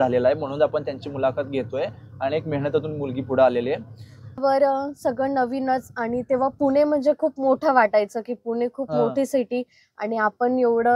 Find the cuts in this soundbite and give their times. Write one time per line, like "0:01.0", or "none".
0:04.4

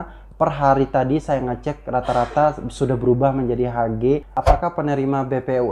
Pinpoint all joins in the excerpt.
0:04.4

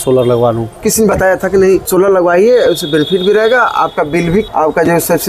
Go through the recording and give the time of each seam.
0:00.9
0:01.9
0:04.5

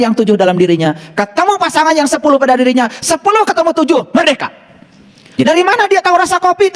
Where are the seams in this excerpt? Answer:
0:05.4

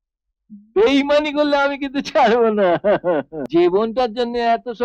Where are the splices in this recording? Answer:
0:03.4

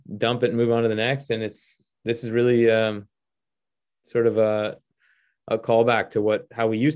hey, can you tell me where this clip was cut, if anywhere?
none

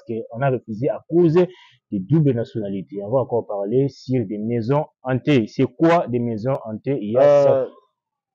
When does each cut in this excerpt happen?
0:07.2

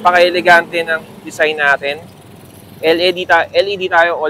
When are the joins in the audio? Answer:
none

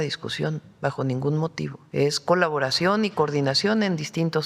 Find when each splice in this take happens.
0:01.8

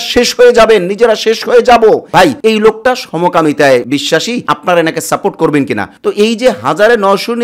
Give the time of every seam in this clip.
0:02.1
0:05.9

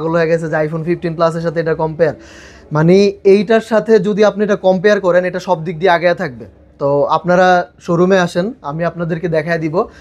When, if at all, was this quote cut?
none

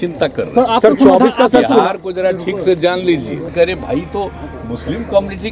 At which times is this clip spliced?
0:03.5

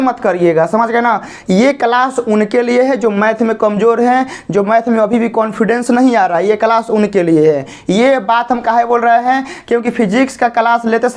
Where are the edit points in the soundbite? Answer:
none

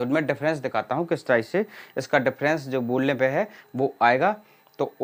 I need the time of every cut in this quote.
none

